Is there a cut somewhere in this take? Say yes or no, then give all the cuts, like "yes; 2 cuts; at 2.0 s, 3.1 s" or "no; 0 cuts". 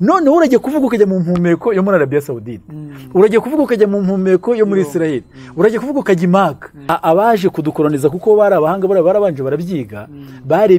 yes; 1 cut; at 6.9 s